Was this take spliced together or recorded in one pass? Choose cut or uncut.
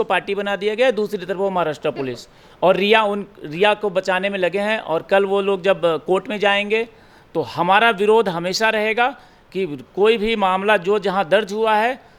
uncut